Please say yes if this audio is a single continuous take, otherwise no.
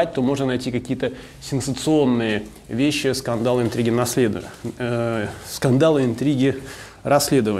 yes